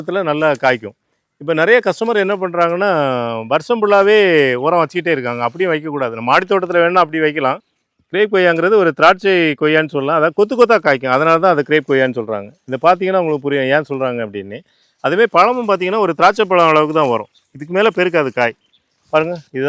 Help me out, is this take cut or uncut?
cut